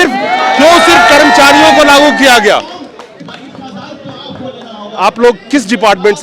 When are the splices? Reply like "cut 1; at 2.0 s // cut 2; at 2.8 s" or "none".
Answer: none